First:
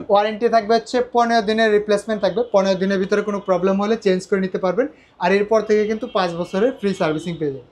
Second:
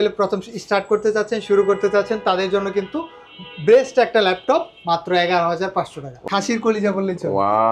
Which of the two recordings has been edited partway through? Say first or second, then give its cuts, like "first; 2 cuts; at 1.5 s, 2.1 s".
second; 1 cut; at 6.2 s